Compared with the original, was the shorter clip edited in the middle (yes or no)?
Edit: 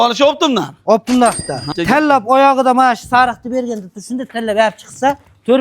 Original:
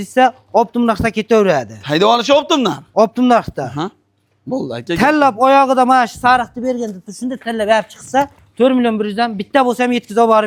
yes